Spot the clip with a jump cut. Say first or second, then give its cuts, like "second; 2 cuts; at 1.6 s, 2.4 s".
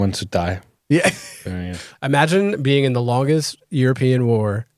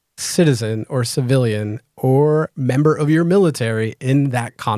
first; 1 cut; at 1.8 s